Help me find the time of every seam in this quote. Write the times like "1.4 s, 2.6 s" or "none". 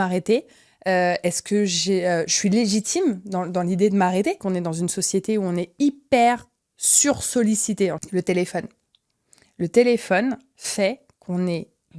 4.4 s, 8.0 s